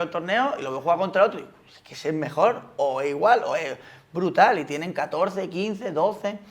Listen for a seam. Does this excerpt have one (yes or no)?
no